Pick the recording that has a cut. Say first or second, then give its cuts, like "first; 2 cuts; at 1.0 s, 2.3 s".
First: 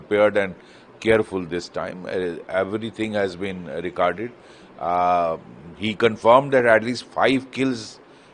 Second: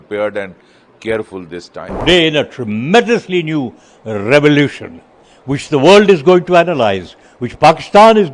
second; 1 cut; at 2.0 s